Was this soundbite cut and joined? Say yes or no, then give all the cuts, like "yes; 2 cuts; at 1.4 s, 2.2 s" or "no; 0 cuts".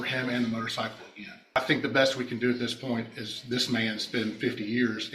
yes; 1 cut; at 1.6 s